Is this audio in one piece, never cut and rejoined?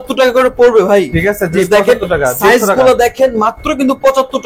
yes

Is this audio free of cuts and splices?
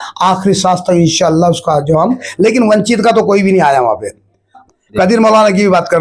no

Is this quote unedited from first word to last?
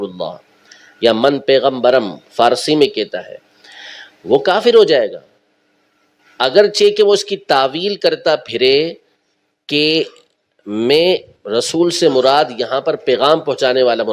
yes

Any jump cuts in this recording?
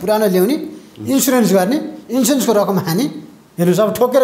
no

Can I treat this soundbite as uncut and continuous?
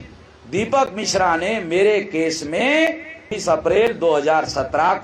no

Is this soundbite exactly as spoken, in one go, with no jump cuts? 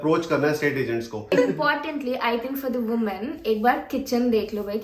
no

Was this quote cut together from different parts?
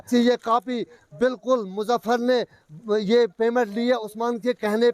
no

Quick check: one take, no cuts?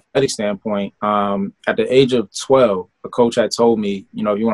no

